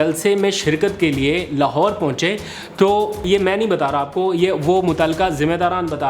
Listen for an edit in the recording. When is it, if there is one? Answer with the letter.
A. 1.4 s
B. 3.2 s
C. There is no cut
B